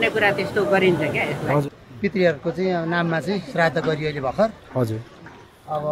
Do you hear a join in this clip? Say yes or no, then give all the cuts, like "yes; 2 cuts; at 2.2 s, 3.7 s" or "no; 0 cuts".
yes; 1 cut; at 1.6 s